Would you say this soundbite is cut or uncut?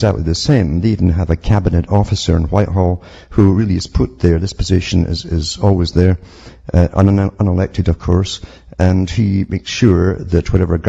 uncut